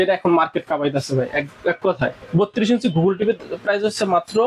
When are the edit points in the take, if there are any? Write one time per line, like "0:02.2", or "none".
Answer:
0:02.2